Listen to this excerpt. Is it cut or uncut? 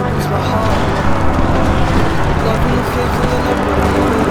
uncut